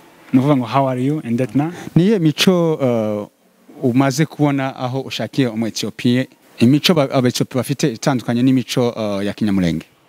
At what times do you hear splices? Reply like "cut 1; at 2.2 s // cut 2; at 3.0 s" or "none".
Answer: cut 1; at 1.8 s // cut 2; at 6.4 s